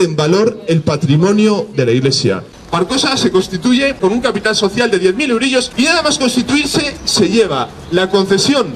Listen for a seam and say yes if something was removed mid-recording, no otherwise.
yes